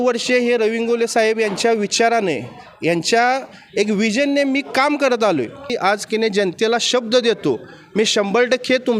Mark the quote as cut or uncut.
cut